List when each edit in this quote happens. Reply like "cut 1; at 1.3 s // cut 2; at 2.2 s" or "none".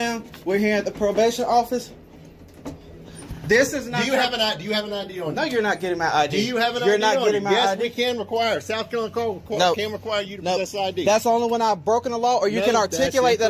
none